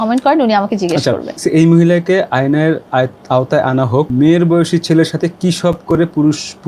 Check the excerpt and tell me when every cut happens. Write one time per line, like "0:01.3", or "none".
0:01.4
0:04.1